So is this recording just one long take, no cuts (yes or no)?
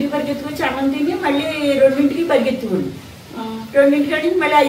yes